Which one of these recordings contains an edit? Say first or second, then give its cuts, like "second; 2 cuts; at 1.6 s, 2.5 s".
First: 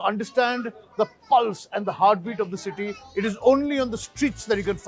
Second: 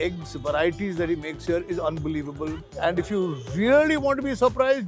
second; 1 cut; at 2.6 s